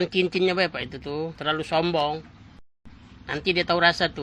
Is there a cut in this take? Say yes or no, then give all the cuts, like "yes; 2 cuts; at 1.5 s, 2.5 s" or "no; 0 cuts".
no; 0 cuts